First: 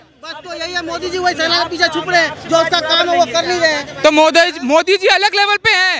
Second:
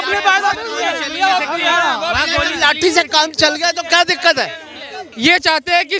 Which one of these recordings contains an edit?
second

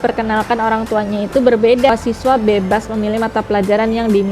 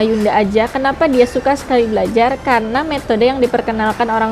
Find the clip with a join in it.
first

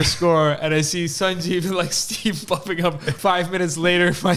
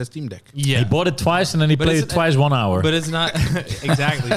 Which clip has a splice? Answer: first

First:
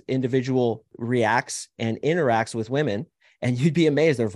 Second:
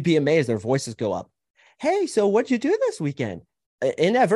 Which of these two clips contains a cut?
first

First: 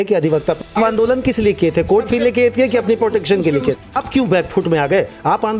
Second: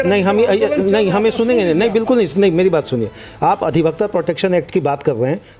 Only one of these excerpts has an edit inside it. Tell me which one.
first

